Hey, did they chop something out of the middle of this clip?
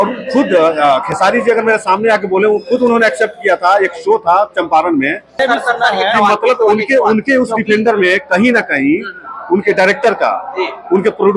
yes; 1 cut; at 5.4 s

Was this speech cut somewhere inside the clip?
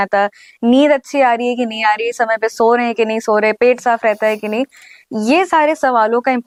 no; 0 cuts

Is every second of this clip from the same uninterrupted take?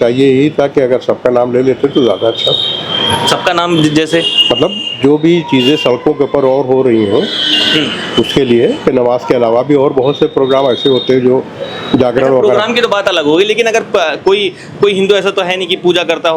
yes; 0 cuts

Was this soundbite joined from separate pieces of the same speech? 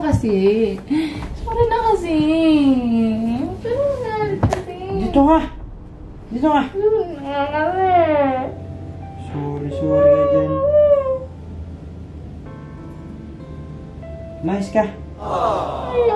no; 0 cuts

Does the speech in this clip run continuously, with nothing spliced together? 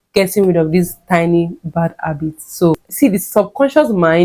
no; 1 cut; at 2.7 s

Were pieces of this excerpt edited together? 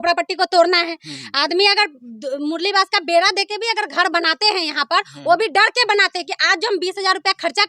no; 0 cuts

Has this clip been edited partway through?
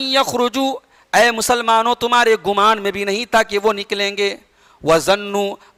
no; 0 cuts

